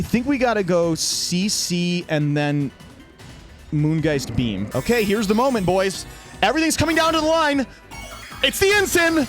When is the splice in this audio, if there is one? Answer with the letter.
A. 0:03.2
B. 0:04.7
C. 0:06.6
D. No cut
B